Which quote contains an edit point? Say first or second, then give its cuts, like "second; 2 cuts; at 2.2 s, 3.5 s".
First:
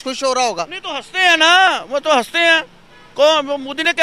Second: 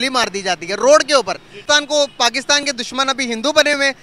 second; 1 cut; at 1.6 s